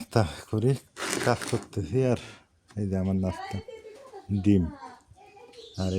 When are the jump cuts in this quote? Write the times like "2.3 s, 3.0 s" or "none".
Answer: none